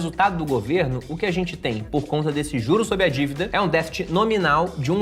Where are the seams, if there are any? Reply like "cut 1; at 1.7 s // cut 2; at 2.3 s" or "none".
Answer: none